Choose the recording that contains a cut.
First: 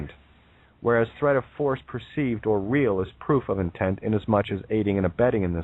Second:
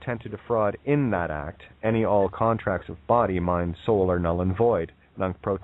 first; 1 cut; at 0.9 s

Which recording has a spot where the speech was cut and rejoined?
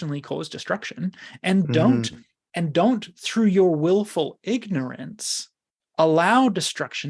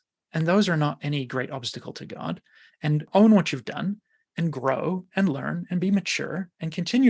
second; 1 cut; at 3.1 s

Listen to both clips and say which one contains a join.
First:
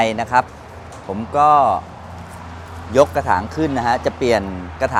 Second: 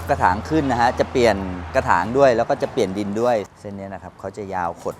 second; 1 cut; at 3.5 s

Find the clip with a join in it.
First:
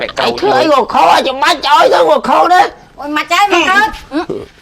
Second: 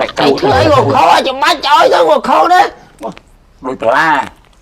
first; 1 cut; at 3.0 s

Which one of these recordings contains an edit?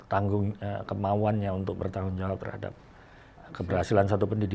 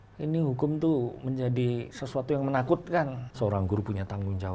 second; 1 cut; at 3.2 s

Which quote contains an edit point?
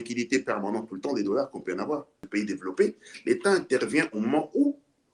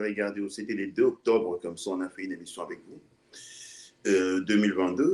first; 1 cut; at 2.2 s

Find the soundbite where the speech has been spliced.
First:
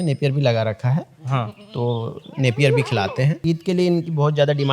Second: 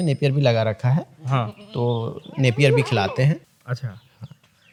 first; 1 cut; at 3.4 s

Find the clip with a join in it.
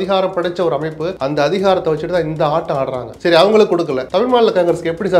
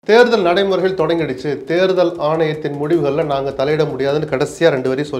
first; 3 cuts; at 1.1 s, 3.1 s, 4.0 s

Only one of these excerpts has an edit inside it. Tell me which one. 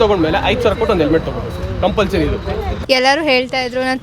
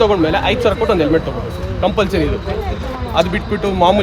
first; 1 cut; at 2.7 s

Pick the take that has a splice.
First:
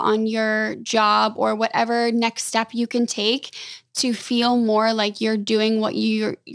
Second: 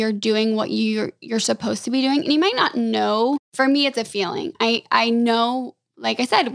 second; 1 cut; at 3.5 s

